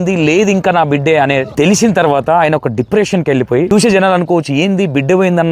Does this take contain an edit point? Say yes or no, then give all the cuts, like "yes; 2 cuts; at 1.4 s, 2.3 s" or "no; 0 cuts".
yes; 2 cuts; at 1.5 s, 3.7 s